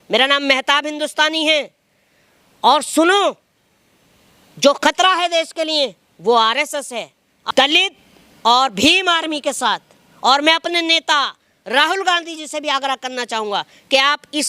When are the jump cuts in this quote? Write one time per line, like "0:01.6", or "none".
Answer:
0:07.3